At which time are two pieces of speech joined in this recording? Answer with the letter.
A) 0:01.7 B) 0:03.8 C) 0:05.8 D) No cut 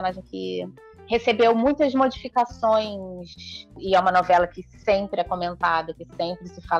B